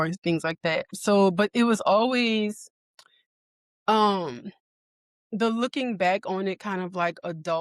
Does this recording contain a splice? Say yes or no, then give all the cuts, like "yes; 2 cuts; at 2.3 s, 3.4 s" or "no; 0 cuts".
yes; 1 cut; at 0.9 s